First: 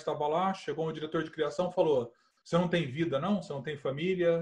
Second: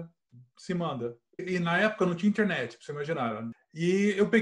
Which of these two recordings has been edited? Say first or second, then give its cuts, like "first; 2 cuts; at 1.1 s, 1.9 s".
second; 2 cuts; at 1.5 s, 3.5 s